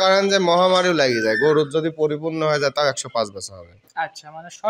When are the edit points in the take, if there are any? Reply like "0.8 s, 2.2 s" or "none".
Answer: none

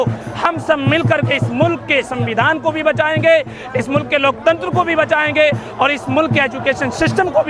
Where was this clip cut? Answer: none

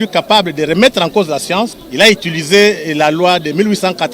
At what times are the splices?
1.8 s

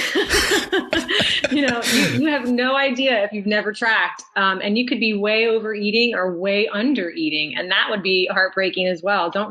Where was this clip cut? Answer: none

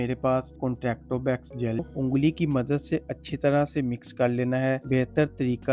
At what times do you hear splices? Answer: 1.9 s

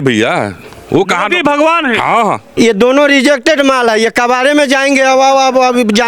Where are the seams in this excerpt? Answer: 2.5 s

